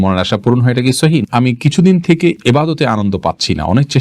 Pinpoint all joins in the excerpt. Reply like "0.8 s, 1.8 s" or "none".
1.2 s